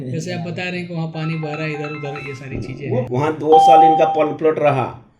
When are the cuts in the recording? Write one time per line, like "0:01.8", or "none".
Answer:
0:03.1